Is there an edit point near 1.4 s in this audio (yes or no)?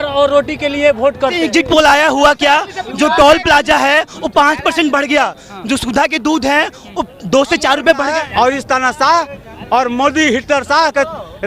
yes